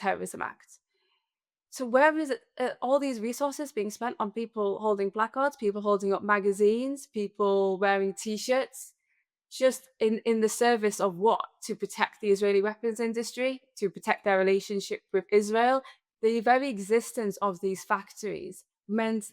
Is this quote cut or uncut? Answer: cut